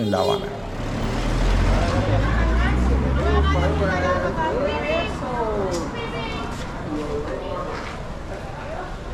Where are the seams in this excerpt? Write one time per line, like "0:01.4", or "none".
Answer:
none